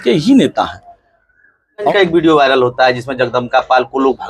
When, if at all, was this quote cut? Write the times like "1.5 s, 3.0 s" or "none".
1.9 s